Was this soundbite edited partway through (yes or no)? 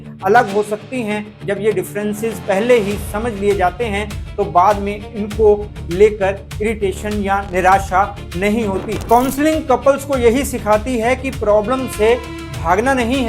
yes